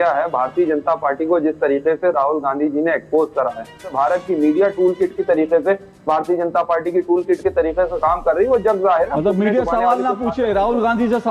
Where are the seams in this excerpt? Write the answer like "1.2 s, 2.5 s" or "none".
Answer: 3.9 s